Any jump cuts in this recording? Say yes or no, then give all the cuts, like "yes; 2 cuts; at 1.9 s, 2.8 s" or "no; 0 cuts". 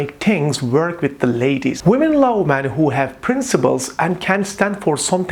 yes; 1 cut; at 1.8 s